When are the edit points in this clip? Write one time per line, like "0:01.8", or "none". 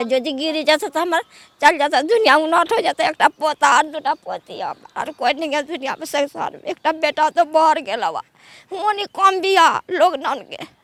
none